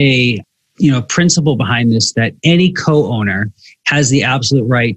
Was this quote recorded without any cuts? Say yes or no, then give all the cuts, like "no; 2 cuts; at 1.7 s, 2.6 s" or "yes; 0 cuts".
yes; 0 cuts